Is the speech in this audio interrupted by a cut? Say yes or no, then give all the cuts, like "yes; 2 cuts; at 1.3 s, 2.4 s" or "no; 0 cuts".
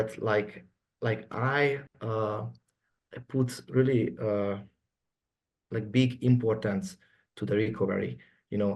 no; 0 cuts